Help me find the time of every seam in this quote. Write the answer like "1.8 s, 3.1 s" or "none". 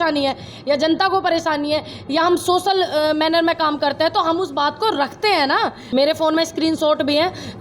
5.8 s